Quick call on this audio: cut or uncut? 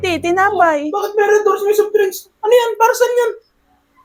uncut